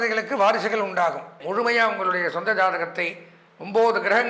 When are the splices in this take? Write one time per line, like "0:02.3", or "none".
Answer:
0:01.4